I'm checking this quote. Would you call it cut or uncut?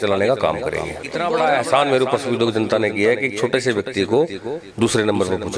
cut